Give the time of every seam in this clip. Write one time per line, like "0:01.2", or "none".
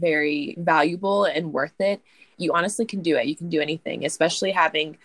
none